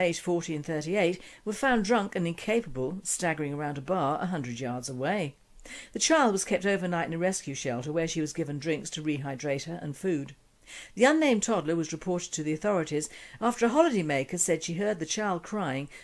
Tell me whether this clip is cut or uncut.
cut